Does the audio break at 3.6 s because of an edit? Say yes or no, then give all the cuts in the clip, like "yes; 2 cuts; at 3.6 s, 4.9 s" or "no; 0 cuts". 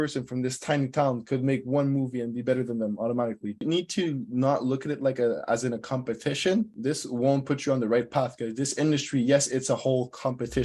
yes; 2 cuts; at 3.6 s, 6.8 s